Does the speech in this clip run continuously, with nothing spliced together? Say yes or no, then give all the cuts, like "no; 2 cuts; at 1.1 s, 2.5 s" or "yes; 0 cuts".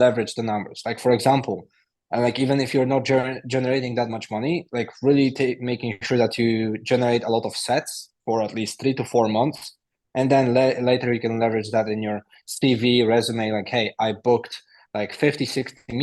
yes; 0 cuts